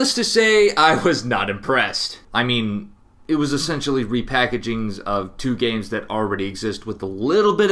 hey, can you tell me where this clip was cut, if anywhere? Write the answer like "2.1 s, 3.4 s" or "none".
1.1 s